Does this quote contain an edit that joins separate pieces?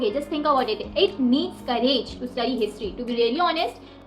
no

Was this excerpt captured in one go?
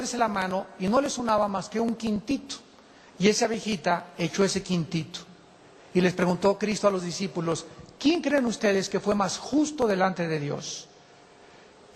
no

